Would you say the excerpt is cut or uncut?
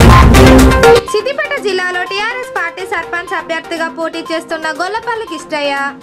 cut